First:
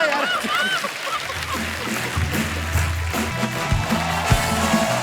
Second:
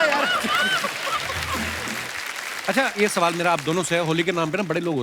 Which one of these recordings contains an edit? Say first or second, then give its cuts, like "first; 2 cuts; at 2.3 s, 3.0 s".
second; 1 cut; at 1.8 s